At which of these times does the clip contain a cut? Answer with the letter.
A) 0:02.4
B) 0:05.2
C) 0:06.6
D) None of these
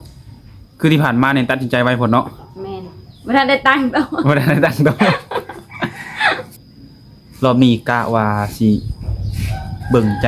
C